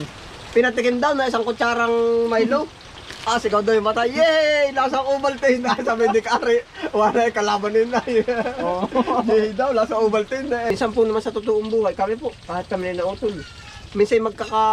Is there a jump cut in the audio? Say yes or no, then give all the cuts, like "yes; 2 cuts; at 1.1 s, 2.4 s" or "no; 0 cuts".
yes; 1 cut; at 10.7 s